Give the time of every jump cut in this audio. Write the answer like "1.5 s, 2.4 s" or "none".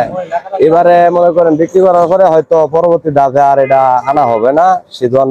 none